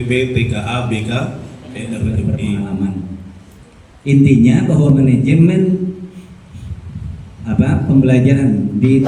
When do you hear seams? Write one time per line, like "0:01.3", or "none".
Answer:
0:02.0